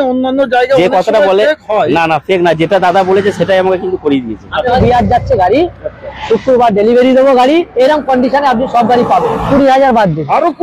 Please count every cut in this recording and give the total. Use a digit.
2